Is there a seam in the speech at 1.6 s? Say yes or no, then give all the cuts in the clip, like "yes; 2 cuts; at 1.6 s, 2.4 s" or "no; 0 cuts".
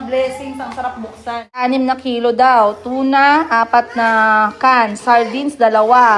yes; 1 cut; at 1.6 s